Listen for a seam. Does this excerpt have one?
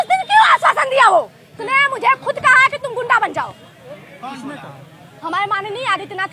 yes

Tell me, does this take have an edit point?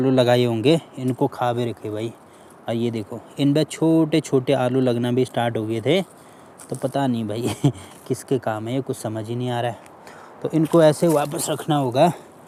no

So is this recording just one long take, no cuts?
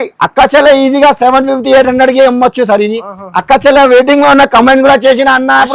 yes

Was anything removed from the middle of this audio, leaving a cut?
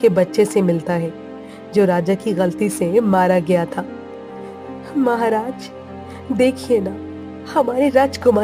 no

